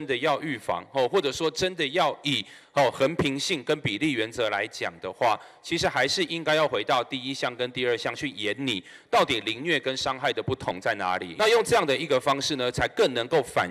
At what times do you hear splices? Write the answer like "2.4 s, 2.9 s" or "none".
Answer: 11.3 s